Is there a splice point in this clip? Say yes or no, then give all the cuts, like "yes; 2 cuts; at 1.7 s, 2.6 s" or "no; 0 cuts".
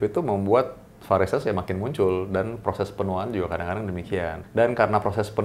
yes; 1 cut; at 4.4 s